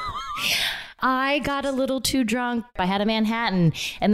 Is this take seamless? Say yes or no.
no